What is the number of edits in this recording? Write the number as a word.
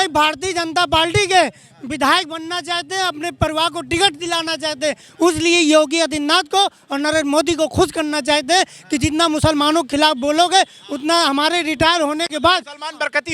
zero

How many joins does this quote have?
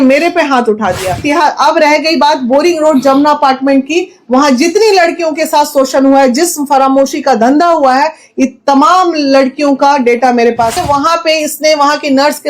two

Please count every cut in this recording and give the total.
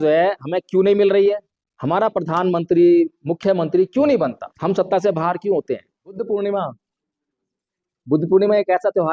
three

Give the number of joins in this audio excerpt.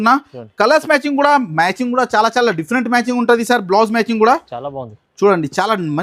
zero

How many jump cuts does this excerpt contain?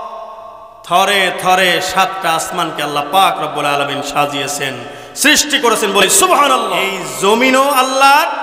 one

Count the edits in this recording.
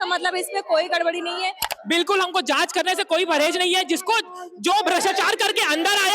one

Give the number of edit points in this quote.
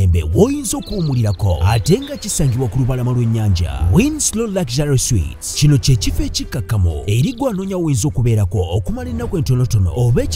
zero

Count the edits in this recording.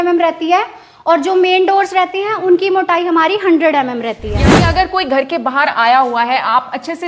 one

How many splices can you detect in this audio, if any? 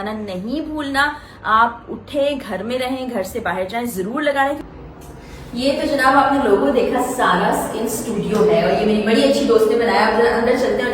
one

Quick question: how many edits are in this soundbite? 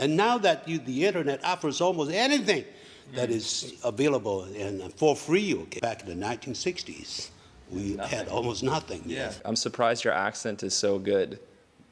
two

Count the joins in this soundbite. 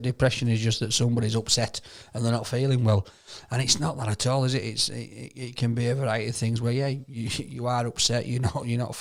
zero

